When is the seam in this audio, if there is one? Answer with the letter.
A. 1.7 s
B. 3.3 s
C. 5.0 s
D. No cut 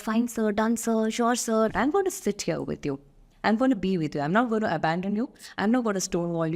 A